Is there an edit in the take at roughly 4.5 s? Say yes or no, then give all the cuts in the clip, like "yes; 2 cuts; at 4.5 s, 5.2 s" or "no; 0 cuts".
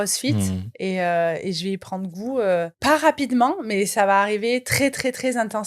no; 1 cut; at 2.7 s